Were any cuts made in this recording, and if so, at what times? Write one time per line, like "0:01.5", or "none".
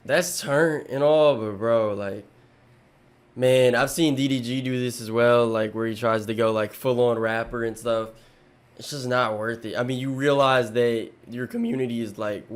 none